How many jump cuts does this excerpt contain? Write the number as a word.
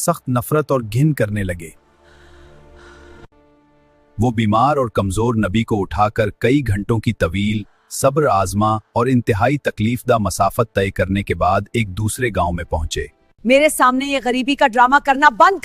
two